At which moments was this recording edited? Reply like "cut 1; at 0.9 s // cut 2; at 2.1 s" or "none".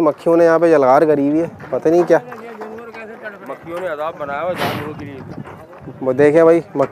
none